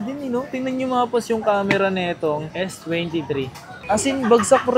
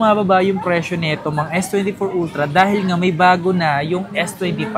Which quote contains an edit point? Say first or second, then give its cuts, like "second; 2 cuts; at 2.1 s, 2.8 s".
first; 1 cut; at 3.8 s